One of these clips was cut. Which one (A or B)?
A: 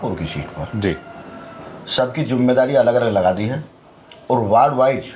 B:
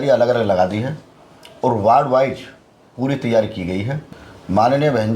B